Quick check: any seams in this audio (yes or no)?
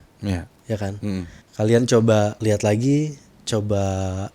yes